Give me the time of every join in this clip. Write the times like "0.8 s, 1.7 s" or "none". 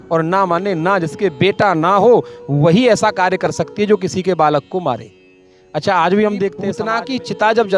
6.6 s